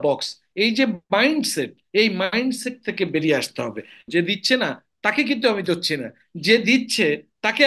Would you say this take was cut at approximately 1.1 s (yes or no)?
no